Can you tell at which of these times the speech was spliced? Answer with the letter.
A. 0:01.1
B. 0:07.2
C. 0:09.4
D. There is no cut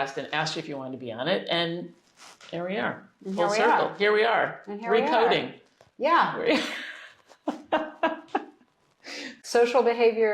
C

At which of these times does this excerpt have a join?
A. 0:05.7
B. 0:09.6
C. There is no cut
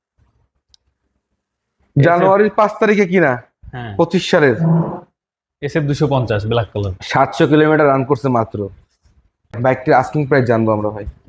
B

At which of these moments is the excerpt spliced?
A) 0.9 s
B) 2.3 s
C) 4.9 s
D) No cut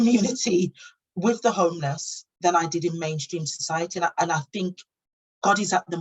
C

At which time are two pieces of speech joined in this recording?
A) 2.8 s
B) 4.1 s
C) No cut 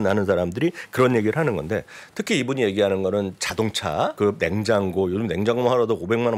B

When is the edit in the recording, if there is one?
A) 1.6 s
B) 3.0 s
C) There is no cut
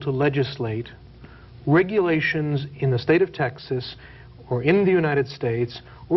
C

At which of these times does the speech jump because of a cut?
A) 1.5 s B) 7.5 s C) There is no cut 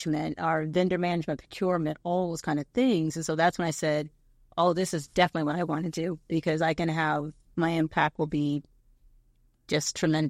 B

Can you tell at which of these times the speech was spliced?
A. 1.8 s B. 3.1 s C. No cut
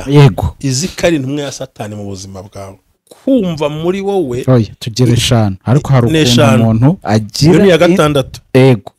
B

